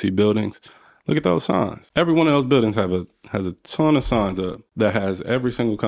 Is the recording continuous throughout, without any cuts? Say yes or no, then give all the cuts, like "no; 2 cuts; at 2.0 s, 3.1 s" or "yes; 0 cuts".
no; 2 cuts; at 1.8 s, 4.6 s